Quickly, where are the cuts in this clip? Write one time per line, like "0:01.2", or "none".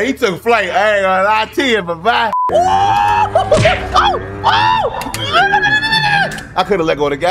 0:02.4